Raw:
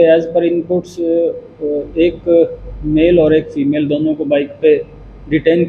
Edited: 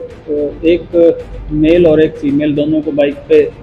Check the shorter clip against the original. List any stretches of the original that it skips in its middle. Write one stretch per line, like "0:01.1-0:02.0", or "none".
none

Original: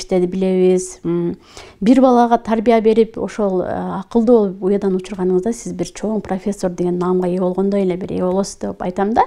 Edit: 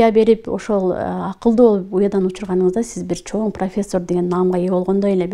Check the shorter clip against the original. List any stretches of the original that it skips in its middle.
none

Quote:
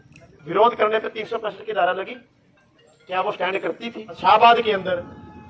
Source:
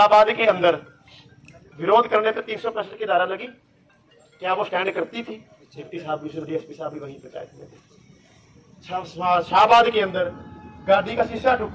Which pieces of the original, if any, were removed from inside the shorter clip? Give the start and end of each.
0:05.5-0:09.5

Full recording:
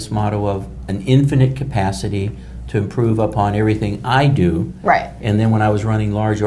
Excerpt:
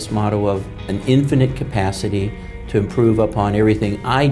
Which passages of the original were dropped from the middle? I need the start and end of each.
none

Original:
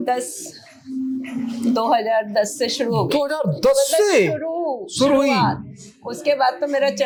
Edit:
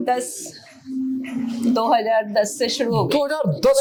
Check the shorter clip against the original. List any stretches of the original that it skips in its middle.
none

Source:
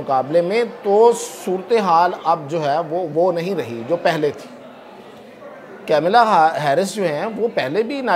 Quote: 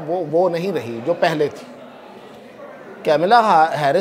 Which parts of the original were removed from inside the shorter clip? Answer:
none

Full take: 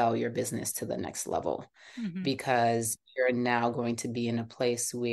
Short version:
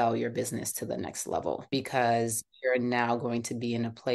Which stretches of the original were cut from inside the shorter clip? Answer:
0:01.7-0:02.2

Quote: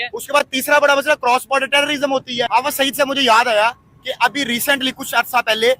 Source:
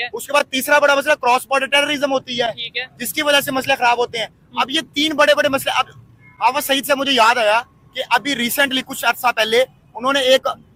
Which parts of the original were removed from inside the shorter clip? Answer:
0:02.5-0:06.4

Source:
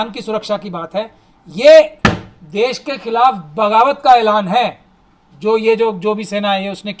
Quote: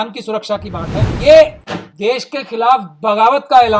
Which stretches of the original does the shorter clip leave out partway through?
0:01.1-0:01.4
0:02.0-0:02.1

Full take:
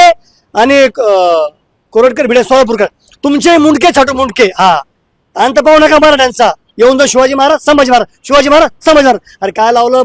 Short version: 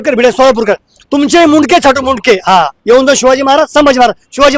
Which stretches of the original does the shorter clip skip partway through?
0:04.9-0:06.7

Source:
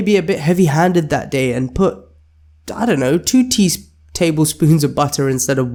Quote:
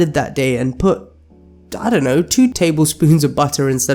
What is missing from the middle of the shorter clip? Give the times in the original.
0:03.5-0:04.1

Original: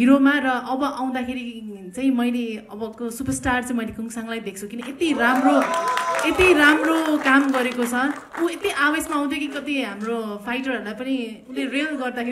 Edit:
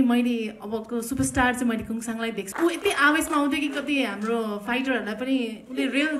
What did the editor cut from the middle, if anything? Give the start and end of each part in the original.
0:04.6-0:08.3

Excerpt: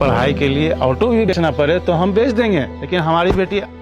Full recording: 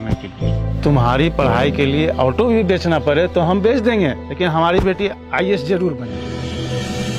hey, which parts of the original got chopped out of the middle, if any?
0:02.7-0:02.8

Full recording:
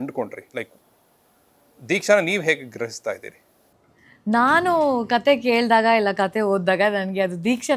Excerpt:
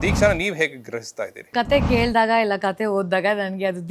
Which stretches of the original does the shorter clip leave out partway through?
0:03.4-0:05.0

